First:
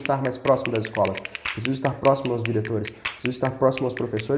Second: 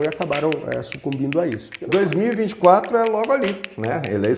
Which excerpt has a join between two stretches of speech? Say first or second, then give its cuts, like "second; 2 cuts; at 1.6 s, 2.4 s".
second; 1 cut; at 1.7 s